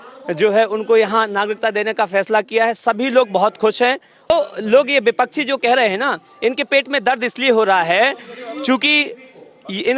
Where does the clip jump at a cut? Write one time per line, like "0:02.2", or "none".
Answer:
0:04.3